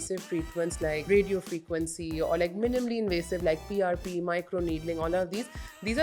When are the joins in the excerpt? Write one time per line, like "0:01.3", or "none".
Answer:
0:01.0